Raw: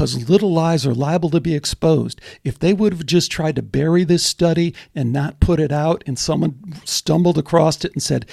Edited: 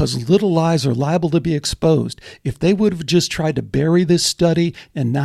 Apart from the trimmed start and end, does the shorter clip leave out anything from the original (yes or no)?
no